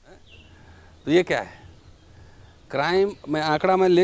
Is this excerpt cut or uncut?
uncut